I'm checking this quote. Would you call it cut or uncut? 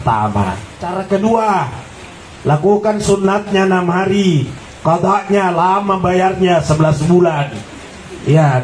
cut